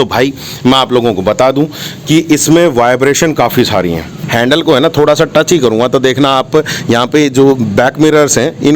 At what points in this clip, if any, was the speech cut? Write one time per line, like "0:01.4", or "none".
0:04.2